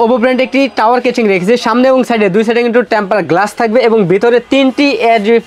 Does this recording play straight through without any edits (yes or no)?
yes